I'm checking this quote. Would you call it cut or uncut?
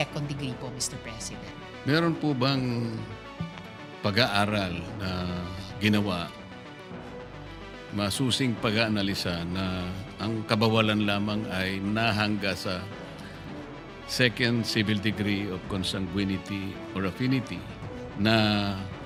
uncut